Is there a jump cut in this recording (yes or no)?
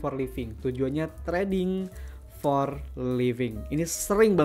no